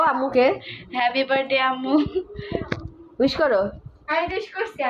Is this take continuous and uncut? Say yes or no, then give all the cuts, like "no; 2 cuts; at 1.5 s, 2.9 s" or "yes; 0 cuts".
yes; 0 cuts